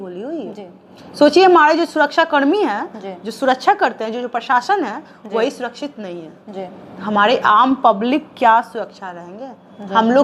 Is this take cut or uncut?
uncut